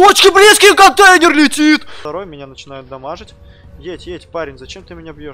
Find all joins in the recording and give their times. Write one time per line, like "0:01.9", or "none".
0:02.0

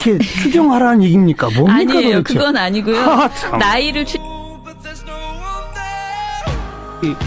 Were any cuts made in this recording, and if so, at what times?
0:04.0

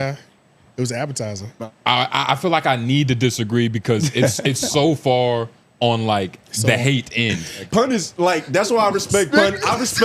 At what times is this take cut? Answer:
0:01.5
0:07.6

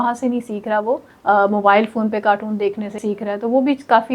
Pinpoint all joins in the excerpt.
0:01.1
0:03.0

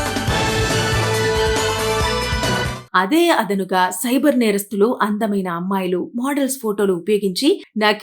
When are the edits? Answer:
0:02.8

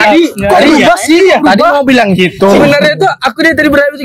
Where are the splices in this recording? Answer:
none

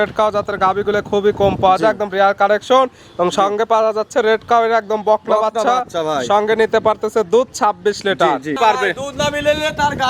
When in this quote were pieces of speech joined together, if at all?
0:08.6

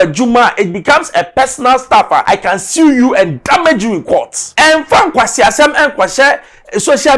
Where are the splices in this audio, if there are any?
0:02.2
0:04.4

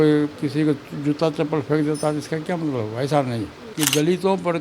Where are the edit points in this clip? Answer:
0:03.6

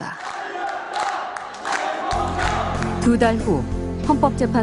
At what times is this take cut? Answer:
none

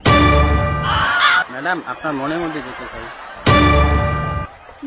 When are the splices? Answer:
0:01.1

